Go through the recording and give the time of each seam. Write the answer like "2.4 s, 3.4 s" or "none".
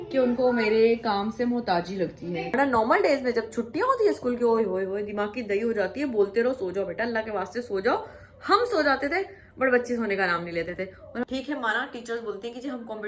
2.5 s, 11.3 s